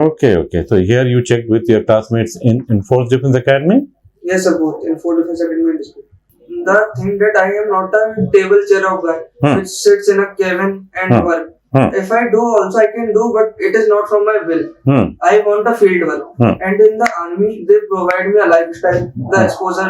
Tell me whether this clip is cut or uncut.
cut